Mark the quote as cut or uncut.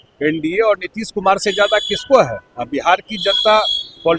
uncut